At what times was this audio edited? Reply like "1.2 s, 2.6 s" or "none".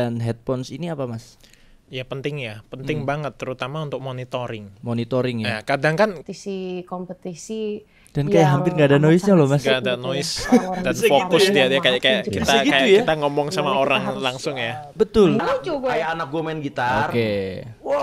6.2 s, 15.4 s